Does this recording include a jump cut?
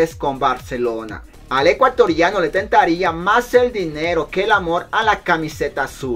no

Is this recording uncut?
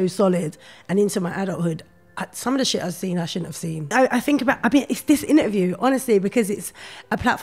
no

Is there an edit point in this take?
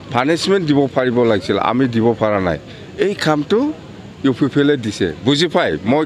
no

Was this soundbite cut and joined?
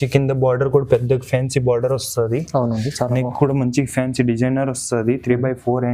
no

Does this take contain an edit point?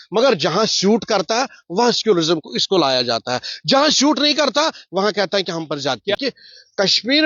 yes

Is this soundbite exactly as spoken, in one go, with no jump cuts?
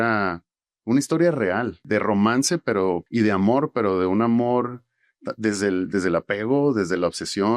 no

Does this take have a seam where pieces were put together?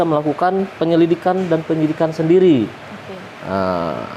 no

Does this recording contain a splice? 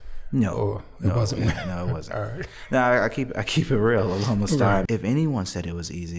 yes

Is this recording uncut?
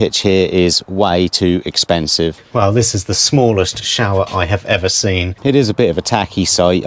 no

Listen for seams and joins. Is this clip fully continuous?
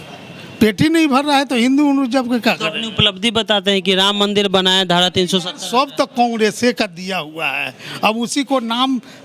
yes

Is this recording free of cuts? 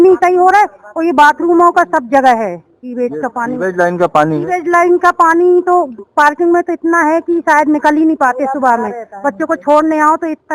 yes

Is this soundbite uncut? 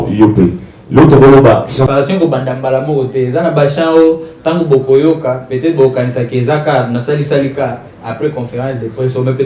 no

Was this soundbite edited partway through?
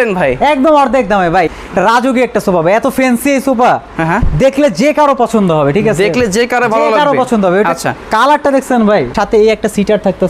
yes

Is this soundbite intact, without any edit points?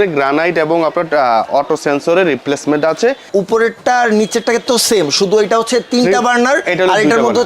no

